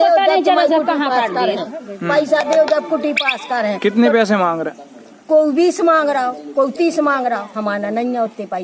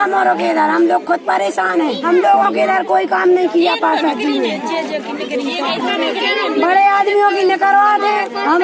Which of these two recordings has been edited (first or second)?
second